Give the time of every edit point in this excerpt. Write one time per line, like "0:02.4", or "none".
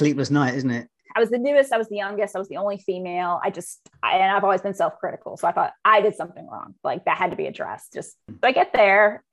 0:00.9
0:08.3